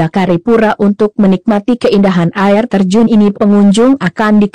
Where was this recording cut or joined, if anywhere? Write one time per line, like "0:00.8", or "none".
0:01.4